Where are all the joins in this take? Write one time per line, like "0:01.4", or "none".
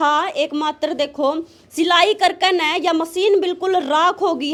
none